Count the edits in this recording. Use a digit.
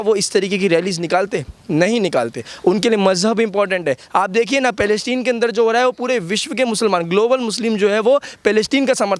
0